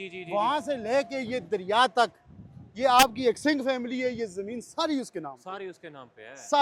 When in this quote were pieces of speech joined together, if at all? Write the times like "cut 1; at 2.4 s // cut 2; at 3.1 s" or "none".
none

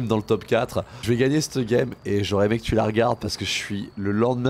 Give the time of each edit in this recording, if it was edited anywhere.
cut 1; at 1.0 s

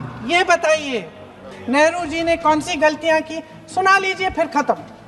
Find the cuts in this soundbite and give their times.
cut 1; at 1.5 s

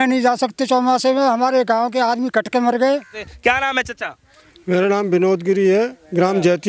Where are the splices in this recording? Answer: cut 1; at 3.3 s

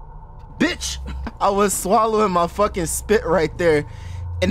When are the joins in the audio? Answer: cut 1; at 1.3 s

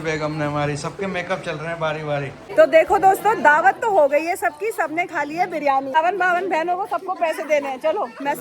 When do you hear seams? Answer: cut 1; at 2.5 s // cut 2; at 6.0 s

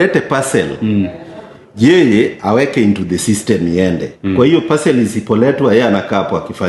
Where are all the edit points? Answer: none

